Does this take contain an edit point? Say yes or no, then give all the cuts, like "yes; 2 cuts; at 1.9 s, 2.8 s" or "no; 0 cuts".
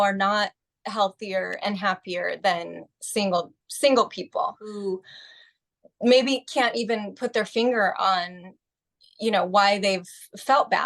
yes; 1 cut; at 4.7 s